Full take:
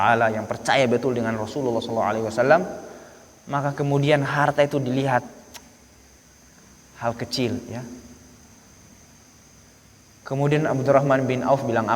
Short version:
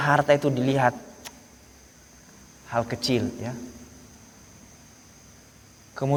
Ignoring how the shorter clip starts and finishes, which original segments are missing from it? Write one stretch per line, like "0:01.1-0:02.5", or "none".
none